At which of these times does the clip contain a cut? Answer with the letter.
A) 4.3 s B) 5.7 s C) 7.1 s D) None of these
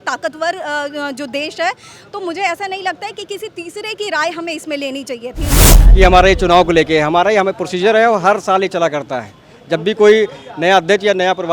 B